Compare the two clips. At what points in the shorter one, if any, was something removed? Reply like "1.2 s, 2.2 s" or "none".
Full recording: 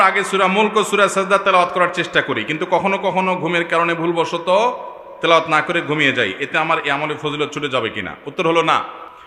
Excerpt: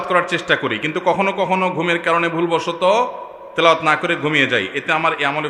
none